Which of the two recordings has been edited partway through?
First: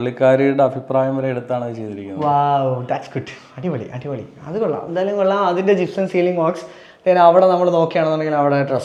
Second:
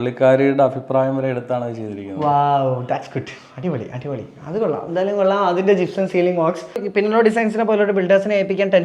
second; 1 cut; at 6.9 s

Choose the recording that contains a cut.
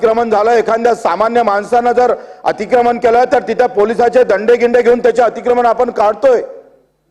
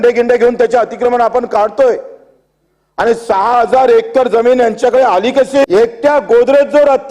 second; 1 cut; at 5.6 s

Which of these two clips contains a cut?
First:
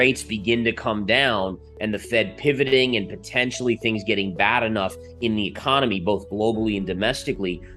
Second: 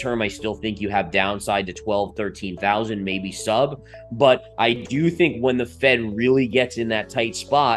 first; 1 cut; at 5.1 s

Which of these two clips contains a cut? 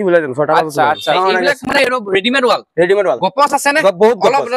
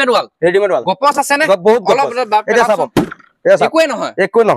first; 1 cut; at 1.2 s

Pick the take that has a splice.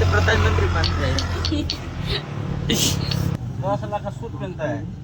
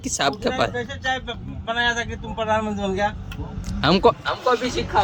first; 1 cut; at 3.4 s

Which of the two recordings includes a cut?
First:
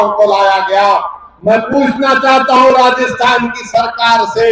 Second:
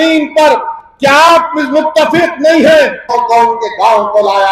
second; 1 cut; at 3.0 s

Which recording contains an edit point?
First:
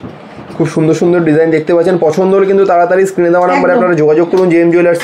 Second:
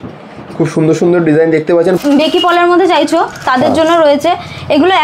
second; 1 cut; at 2.0 s

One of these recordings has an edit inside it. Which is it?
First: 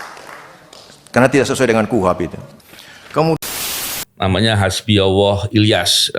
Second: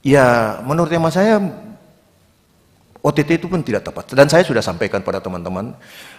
first; 1 cut; at 3.5 s

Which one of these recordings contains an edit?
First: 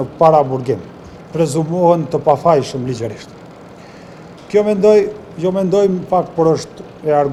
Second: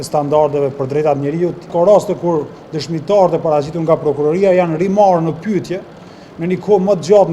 second; 1 cut; at 1.6 s

